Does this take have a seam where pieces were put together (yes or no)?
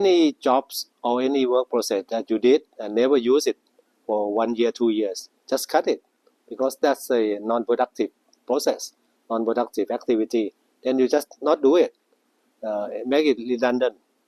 no